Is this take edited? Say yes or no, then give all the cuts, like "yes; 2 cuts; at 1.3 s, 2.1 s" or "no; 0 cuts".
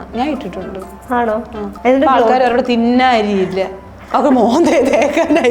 yes; 1 cut; at 1.6 s